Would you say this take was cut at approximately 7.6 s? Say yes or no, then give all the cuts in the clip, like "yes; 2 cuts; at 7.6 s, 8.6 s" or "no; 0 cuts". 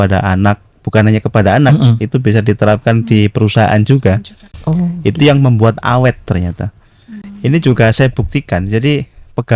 no; 0 cuts